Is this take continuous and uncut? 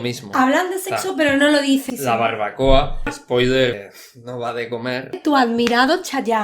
no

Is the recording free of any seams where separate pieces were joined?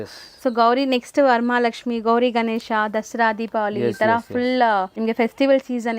no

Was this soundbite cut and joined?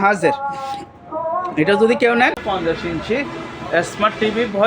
yes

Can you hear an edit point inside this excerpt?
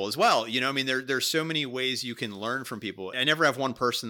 yes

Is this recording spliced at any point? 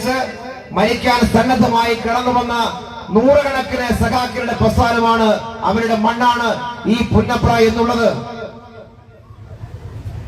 no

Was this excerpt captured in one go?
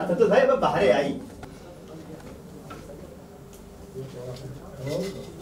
yes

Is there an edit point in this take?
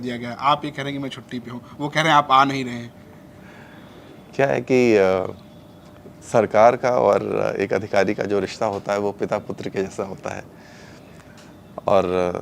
no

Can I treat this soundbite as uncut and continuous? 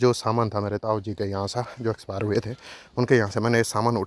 yes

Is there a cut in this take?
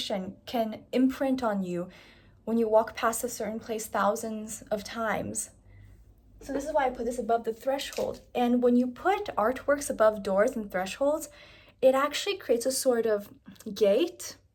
no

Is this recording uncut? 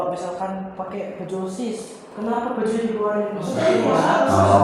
yes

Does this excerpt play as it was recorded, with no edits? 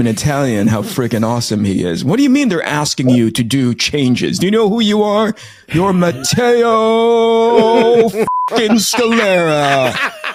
yes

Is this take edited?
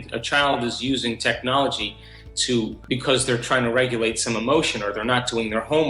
yes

